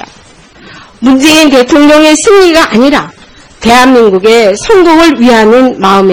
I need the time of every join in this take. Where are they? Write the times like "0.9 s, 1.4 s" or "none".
none